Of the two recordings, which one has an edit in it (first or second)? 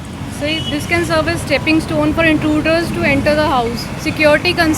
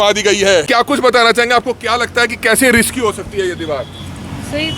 second